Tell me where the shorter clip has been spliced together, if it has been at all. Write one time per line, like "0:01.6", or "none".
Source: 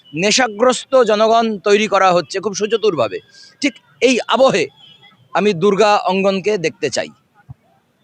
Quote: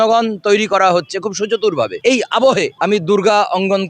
0:01.9
0:02.7